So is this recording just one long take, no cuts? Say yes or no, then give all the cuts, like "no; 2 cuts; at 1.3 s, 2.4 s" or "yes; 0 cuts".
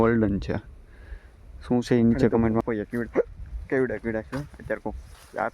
no; 1 cut; at 2.6 s